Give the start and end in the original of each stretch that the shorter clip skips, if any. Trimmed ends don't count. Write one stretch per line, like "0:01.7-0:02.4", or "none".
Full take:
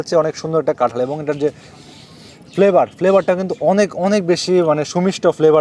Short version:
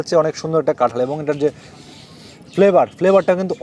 none